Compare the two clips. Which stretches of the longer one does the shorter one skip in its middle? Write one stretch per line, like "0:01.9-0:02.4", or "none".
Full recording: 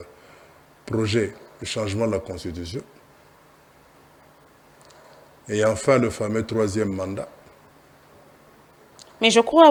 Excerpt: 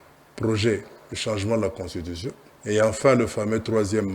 0:03.0-0:05.3